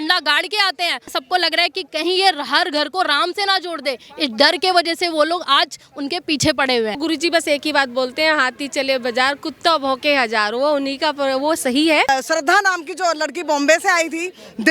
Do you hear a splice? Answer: yes; 3 cuts; at 1.1 s, 7.0 s, 12.1 s

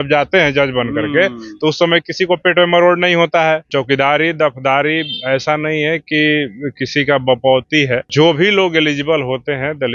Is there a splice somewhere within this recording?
yes; 2 cuts; at 3.7 s, 8.1 s

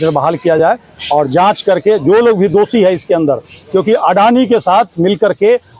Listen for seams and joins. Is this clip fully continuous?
yes; 0 cuts

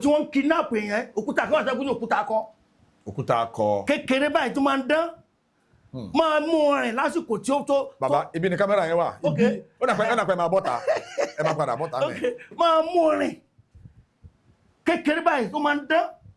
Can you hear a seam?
no; 0 cuts

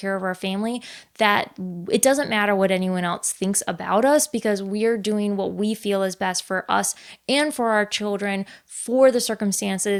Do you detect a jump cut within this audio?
no; 0 cuts

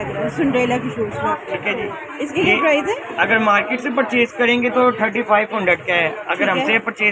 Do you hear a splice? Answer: no; 0 cuts

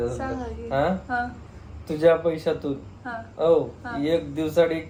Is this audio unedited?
yes; 0 cuts

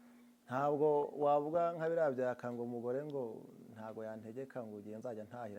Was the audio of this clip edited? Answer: no; 0 cuts

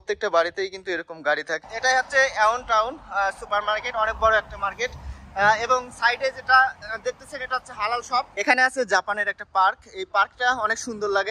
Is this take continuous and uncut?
no; 2 cuts; at 1.6 s, 8.3 s

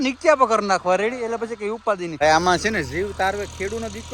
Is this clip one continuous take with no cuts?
no; 1 cut; at 2.2 s

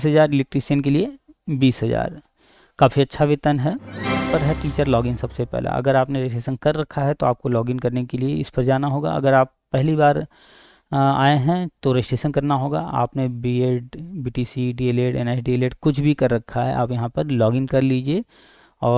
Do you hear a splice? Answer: yes; 1 cut; at 4.3 s

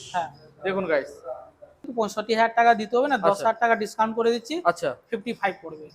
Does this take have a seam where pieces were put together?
yes; 1 cut; at 1.9 s

